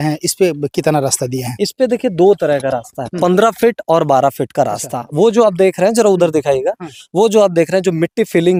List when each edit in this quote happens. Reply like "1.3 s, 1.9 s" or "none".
none